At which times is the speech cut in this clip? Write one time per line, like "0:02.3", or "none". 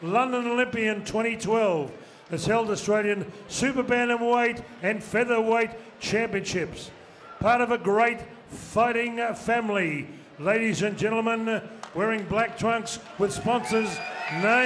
0:11.1